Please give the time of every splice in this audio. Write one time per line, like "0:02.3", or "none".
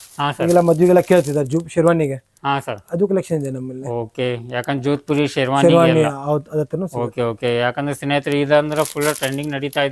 none